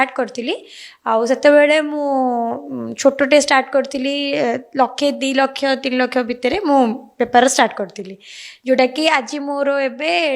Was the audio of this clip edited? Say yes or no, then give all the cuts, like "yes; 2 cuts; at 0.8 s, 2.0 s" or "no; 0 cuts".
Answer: no; 0 cuts